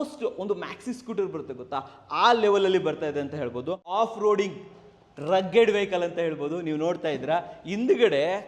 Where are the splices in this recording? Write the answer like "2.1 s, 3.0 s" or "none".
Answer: 3.9 s